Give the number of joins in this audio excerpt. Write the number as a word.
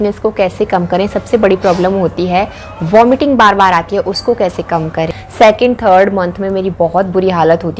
one